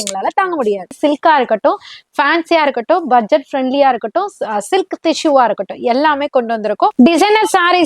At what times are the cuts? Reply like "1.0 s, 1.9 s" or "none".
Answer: 0.9 s, 6.9 s